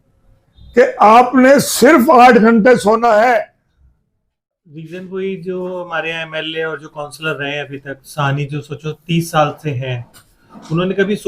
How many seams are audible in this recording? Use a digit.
1